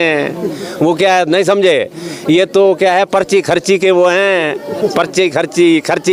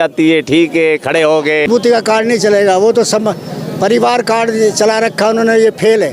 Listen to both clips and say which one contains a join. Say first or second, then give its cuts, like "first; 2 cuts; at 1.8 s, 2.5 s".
second; 1 cut; at 1.7 s